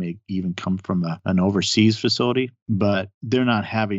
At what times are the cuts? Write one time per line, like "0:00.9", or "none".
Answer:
0:01.2
0:02.6